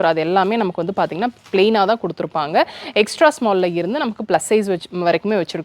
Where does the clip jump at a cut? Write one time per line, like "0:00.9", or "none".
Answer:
none